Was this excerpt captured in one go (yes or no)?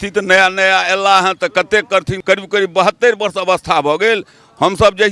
no